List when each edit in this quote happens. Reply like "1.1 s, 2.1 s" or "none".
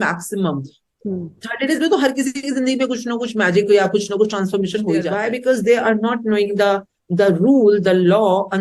5.1 s